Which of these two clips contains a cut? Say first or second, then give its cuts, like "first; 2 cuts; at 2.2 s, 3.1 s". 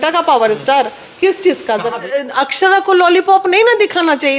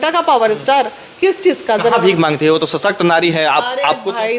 first; 1 cut; at 1.9 s